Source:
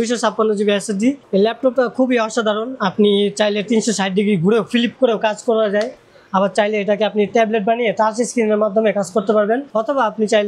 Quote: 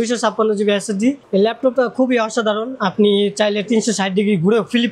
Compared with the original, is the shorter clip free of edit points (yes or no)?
yes